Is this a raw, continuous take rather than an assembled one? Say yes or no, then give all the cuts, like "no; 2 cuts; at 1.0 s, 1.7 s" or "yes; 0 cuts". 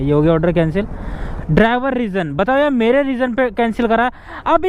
no; 1 cut; at 1.3 s